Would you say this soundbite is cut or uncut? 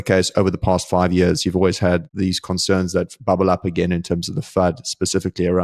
cut